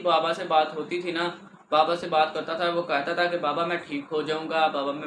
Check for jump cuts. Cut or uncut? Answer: uncut